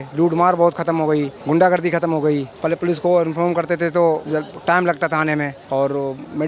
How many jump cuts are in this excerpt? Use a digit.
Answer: 4